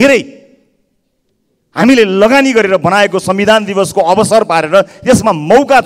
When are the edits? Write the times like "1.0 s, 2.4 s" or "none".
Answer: none

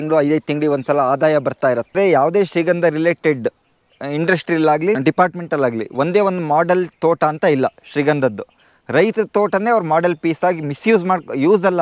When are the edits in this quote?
2.0 s, 5.0 s

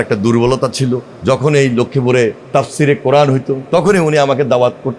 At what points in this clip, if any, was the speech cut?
1.1 s, 2.4 s, 3.6 s

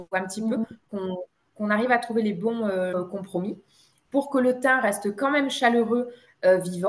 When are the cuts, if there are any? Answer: 2.9 s

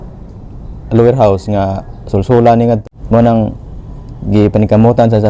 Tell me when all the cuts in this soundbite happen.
2.8 s

